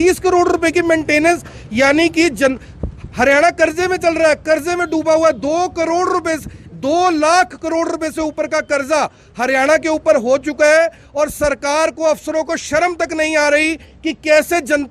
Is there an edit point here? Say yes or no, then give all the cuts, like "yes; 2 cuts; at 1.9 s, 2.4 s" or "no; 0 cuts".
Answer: no; 0 cuts